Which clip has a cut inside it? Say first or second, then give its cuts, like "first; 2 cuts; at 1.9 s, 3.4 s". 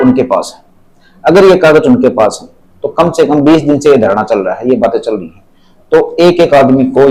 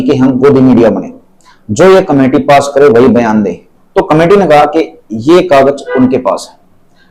second; 1 cut; at 3.6 s